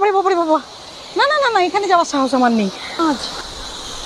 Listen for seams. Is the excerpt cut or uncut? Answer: cut